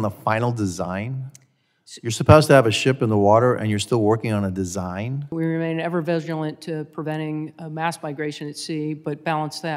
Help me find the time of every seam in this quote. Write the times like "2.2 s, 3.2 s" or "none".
5.3 s